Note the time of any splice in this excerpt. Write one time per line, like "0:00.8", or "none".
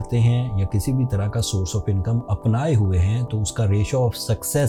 none